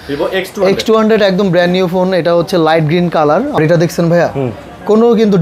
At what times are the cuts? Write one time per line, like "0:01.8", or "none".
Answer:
0:03.6